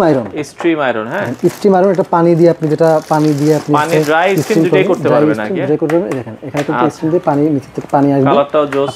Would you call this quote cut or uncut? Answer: uncut